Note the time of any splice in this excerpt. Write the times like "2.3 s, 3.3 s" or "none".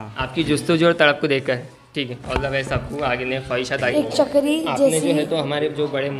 3.9 s